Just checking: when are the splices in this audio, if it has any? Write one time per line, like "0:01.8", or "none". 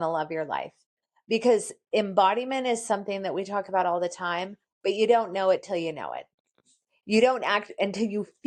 none